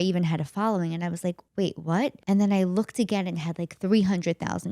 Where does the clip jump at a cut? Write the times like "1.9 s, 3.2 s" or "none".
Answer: 1.4 s, 2.2 s